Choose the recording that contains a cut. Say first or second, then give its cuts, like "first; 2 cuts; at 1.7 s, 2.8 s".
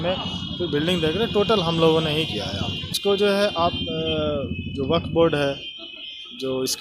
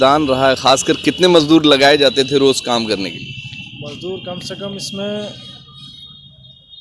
first; 1 cut; at 2.9 s